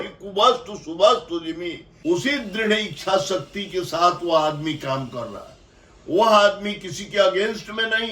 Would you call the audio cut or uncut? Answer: cut